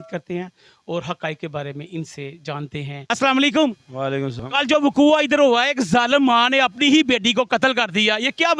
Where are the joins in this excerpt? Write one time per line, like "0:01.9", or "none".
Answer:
0:03.1
0:04.4